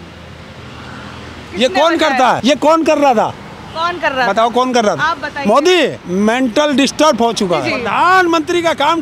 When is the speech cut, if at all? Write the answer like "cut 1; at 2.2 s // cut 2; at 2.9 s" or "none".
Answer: cut 1; at 2.4 s // cut 2; at 6.0 s // cut 3; at 7.7 s